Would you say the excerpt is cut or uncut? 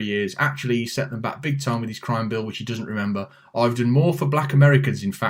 uncut